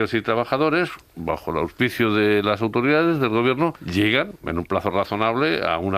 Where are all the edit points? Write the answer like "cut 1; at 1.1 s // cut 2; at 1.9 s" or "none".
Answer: cut 1; at 3.8 s

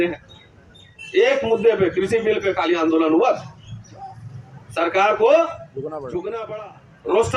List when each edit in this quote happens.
cut 1; at 6.5 s

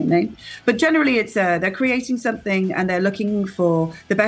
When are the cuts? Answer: none

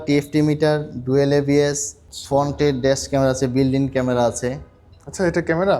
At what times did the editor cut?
none

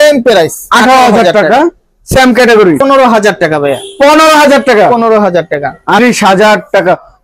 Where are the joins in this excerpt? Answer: cut 1; at 2.8 s // cut 2; at 6.0 s

